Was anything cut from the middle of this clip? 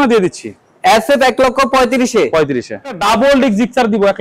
yes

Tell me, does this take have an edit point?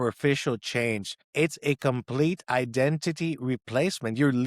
yes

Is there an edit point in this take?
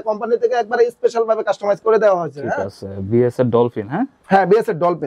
no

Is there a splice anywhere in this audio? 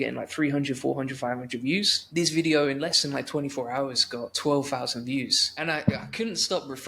yes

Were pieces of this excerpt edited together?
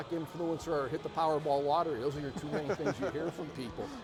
no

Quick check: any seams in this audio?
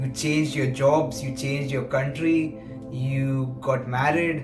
no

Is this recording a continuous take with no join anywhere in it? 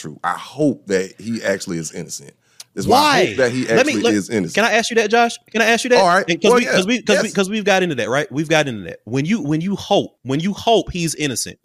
no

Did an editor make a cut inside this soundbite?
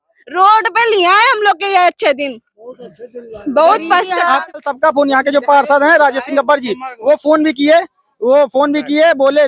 yes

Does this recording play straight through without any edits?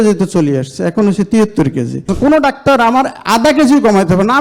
no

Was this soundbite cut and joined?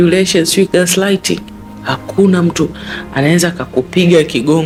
no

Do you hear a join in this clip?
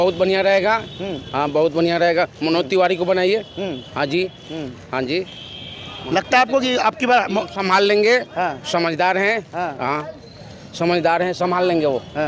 no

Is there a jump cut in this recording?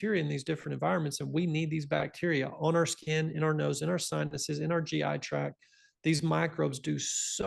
no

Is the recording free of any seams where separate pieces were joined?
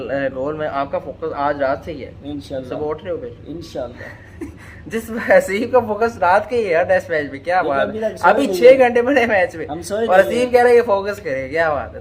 yes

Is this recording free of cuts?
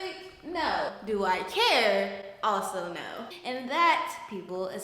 no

